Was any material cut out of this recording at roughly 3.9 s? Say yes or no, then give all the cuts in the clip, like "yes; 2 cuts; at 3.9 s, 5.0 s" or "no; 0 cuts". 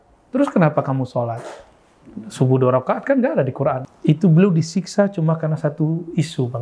yes; 1 cut; at 3.9 s